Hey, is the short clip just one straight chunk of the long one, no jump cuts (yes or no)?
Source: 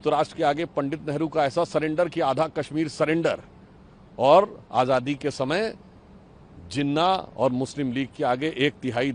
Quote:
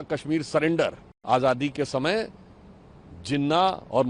no